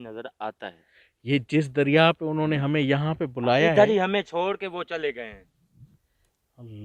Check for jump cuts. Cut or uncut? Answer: uncut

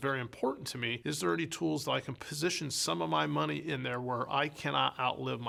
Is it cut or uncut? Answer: uncut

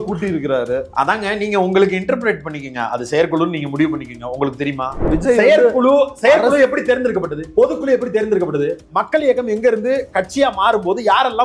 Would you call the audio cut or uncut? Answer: cut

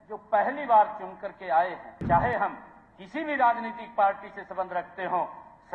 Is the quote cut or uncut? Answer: cut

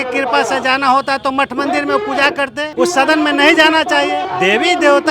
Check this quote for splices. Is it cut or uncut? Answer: cut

